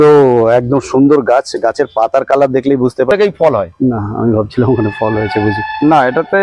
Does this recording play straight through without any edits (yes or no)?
no